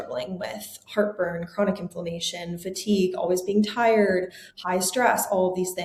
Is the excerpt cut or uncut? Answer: uncut